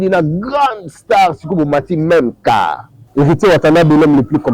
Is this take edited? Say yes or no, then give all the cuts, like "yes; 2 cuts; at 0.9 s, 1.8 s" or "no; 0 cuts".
yes; 1 cut; at 3.0 s